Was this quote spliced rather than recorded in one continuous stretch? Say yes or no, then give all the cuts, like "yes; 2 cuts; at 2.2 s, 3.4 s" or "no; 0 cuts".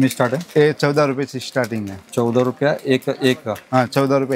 no; 0 cuts